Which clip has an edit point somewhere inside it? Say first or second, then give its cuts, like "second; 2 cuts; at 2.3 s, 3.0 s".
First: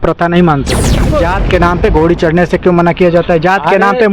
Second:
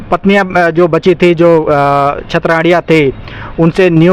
first; 1 cut; at 1.0 s